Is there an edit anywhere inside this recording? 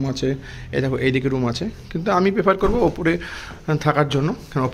no; 0 cuts

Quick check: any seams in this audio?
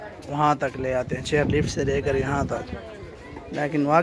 no; 0 cuts

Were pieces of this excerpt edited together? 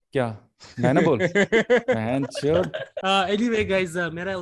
yes; 1 cut; at 2.9 s

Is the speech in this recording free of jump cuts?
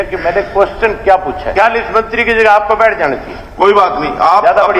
no; 1 cut; at 1.5 s

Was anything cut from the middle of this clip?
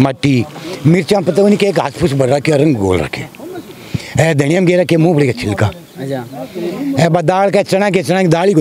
no; 0 cuts

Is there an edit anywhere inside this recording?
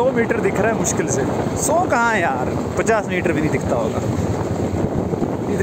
no; 0 cuts

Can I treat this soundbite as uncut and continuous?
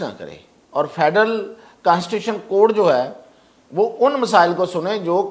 yes; 0 cuts

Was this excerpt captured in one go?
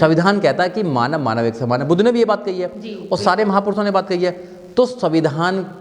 yes; 0 cuts

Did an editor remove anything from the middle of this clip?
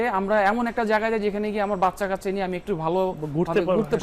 no; 0 cuts

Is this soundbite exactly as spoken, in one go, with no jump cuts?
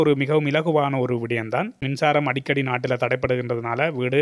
no; 1 cut; at 1.8 s

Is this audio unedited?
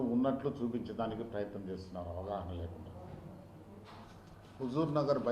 no; 1 cut; at 4.1 s

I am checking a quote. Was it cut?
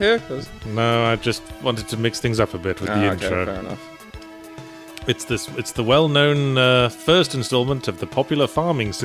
no; 0 cuts

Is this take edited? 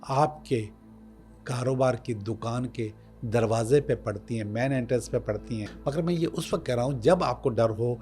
yes; 1 cut; at 5.7 s

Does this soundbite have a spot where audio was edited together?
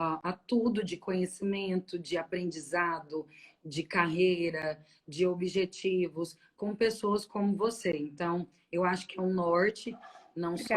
no; 0 cuts

